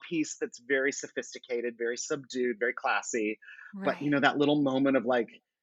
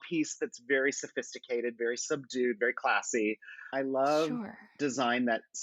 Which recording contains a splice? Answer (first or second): second